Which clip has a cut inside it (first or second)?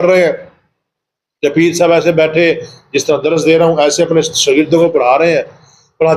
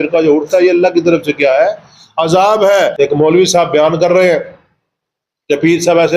second